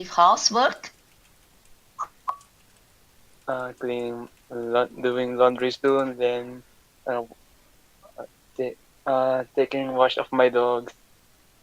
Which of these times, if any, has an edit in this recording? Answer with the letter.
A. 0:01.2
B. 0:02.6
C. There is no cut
B